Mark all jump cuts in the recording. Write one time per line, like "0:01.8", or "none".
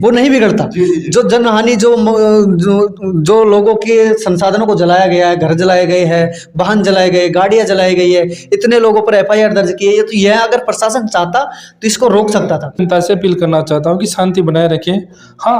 0:12.8